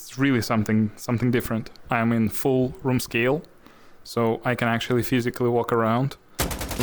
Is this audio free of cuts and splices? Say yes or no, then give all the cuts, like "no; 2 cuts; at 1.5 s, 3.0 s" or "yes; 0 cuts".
no; 1 cut; at 1.8 s